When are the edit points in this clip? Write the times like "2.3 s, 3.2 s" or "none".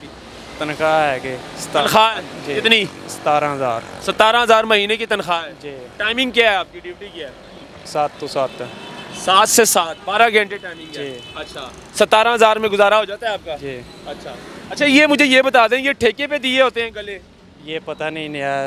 none